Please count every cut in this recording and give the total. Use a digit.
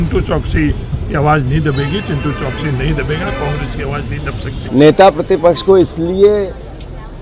1